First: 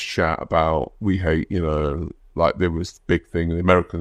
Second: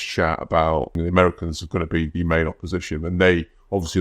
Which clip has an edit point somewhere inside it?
second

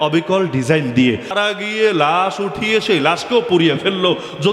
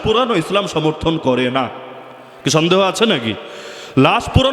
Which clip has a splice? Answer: first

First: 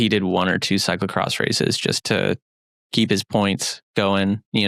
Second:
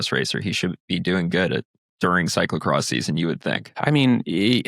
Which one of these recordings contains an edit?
second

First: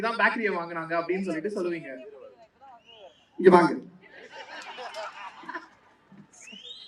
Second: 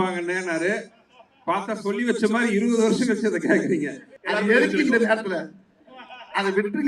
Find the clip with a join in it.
second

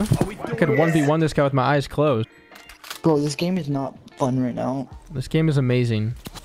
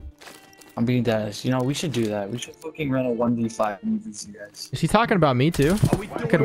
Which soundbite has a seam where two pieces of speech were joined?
first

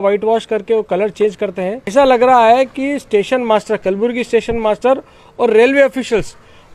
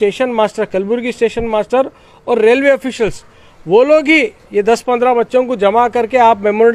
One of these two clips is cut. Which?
first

